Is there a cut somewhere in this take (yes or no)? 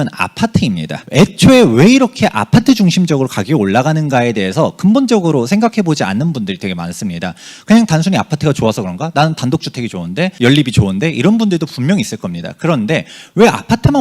yes